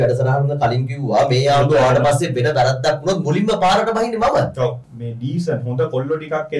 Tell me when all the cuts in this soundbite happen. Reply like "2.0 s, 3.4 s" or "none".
4.9 s